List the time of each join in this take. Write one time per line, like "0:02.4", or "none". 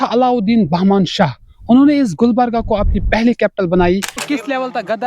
0:04.2